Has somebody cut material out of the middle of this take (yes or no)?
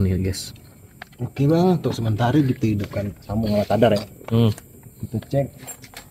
no